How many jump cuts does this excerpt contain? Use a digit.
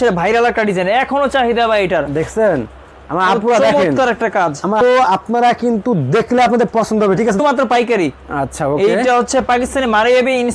2